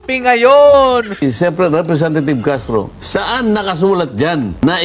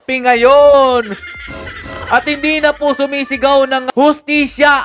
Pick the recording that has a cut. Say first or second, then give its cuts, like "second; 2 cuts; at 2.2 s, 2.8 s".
first; 1 cut; at 1.2 s